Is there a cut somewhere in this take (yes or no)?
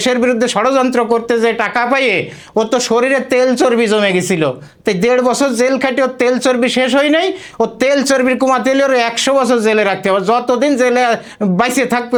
no